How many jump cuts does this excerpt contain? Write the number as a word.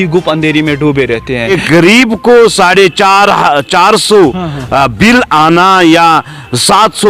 one